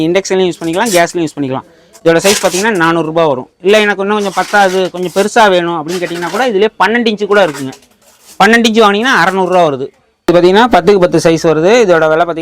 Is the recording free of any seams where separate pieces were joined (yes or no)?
yes